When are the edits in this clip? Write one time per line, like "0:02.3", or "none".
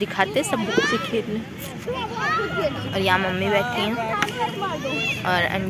none